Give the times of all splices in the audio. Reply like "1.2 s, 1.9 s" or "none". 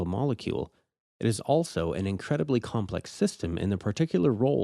2.5 s